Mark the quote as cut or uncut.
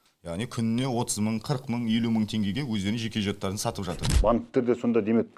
cut